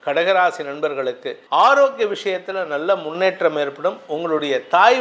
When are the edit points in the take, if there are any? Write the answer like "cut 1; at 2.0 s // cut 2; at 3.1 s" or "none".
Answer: cut 1; at 1.3 s